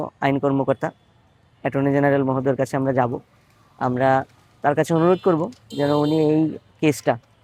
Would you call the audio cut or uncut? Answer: uncut